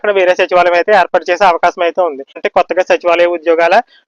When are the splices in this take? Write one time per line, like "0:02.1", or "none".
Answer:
0:02.4